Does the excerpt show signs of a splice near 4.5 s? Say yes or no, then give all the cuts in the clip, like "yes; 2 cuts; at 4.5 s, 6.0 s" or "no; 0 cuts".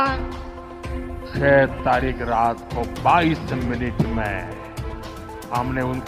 no; 0 cuts